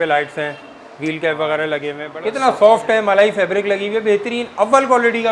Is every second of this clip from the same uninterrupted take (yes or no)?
no